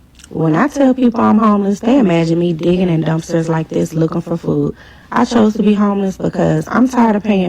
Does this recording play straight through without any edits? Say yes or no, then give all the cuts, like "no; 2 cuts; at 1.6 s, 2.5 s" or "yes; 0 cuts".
no; 1 cut; at 4.8 s